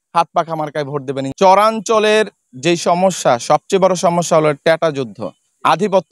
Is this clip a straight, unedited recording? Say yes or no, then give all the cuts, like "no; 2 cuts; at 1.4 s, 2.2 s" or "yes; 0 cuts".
no; 1 cut; at 1.3 s